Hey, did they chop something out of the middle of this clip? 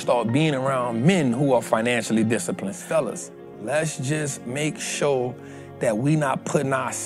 yes; 1 cut; at 2.8 s

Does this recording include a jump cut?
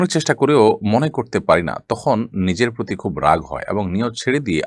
no; 0 cuts

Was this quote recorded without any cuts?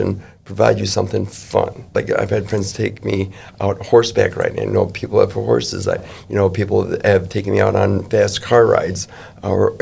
no; 1 cut; at 1.9 s

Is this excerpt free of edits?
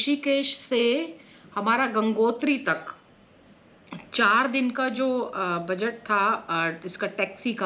yes; 0 cuts

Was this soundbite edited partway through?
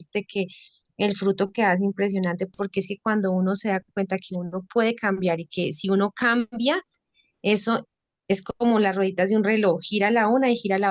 no; 0 cuts

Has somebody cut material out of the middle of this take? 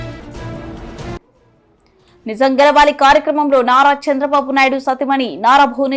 yes; 1 cut; at 1.2 s

